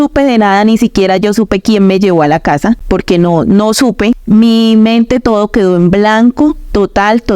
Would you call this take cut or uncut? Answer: cut